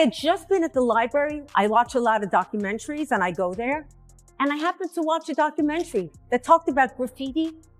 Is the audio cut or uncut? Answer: uncut